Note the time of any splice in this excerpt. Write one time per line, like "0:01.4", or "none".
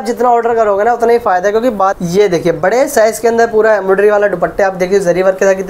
0:01.9